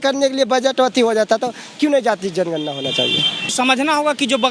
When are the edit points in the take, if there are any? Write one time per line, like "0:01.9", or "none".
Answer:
0:03.5